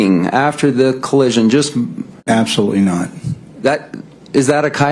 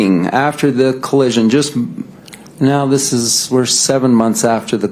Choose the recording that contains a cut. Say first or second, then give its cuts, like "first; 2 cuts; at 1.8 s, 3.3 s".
first; 1 cut; at 2.2 s